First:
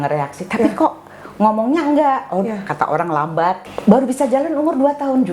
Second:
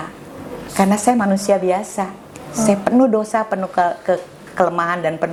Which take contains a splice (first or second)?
first